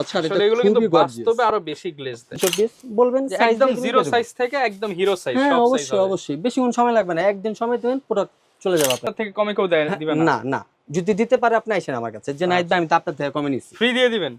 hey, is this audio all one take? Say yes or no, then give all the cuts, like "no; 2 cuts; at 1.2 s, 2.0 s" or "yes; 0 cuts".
no; 2 cuts; at 2.4 s, 9.1 s